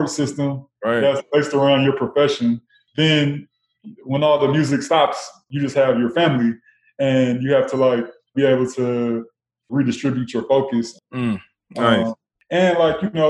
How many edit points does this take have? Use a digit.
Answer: 6